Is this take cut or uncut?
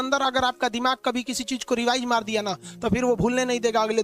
uncut